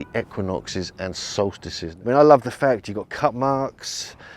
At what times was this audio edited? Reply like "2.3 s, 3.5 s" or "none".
1.9 s